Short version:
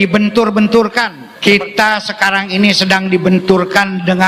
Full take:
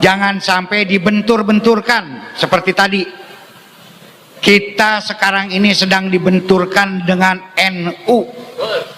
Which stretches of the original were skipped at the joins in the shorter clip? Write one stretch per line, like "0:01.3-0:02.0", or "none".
0:02.1-0:04.2